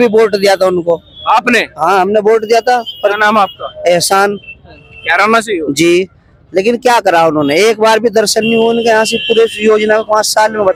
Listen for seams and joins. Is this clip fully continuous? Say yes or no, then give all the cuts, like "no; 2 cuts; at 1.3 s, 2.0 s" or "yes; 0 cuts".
yes; 0 cuts